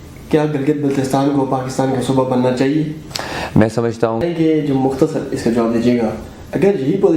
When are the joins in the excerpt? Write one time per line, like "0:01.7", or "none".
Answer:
0:04.2